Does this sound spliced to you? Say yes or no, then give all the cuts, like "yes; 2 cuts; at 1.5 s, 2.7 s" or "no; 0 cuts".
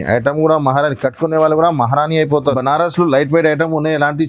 yes; 1 cut; at 2.5 s